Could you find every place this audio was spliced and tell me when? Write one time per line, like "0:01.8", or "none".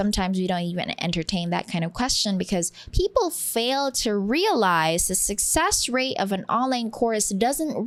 none